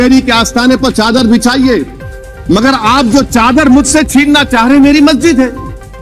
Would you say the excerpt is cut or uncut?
uncut